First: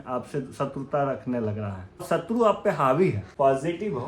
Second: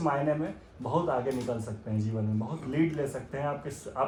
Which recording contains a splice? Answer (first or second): first